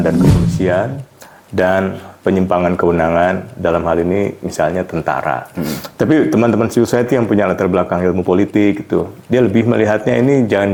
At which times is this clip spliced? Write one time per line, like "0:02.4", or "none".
none